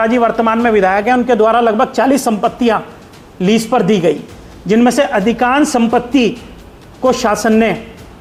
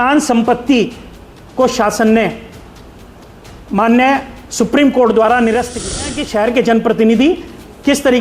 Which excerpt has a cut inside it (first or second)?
second